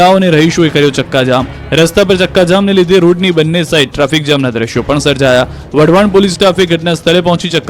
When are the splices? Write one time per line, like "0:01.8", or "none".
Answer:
none